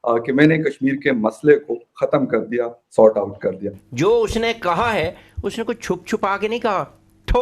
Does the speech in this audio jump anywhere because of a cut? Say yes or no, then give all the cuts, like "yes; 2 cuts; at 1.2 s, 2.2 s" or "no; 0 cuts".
yes; 1 cut; at 3.8 s